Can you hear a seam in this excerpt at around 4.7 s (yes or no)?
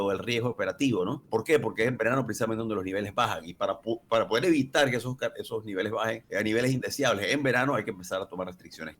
no